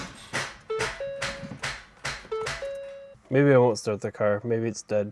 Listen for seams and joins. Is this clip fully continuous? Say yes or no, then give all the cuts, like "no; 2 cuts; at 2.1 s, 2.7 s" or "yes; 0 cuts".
no; 1 cut; at 3.1 s